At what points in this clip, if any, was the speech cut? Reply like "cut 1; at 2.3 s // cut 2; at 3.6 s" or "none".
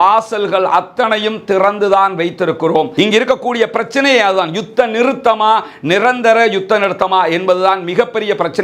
cut 1; at 2.9 s